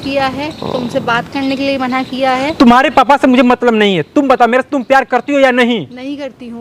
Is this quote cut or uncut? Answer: uncut